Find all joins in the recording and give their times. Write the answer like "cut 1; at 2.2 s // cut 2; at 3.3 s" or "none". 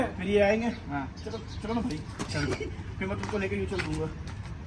none